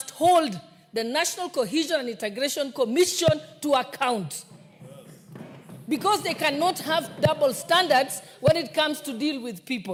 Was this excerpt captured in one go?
yes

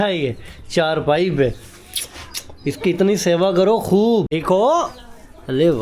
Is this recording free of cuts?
no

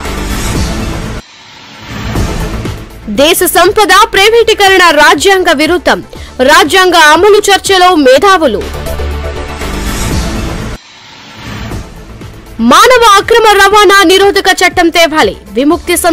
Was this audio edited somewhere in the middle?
yes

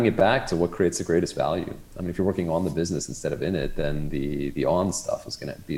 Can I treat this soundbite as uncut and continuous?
yes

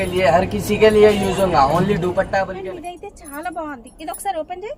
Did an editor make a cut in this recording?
yes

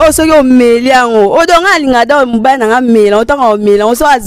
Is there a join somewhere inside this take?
no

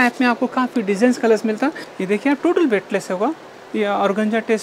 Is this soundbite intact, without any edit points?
no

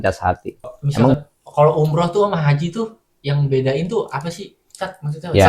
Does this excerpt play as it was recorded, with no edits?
no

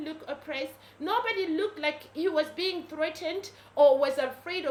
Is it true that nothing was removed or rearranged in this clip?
yes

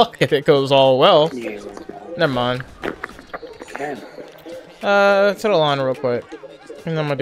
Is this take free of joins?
yes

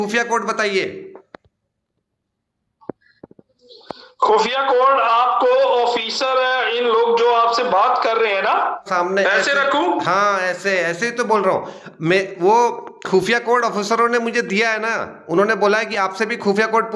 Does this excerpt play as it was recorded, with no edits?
no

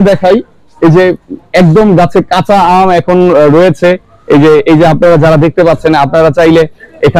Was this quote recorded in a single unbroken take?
yes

